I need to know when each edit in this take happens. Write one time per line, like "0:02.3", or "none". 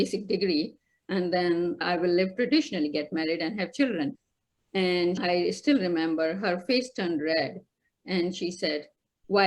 0:04.1
0:05.2